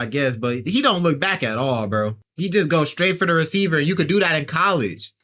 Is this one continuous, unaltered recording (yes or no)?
yes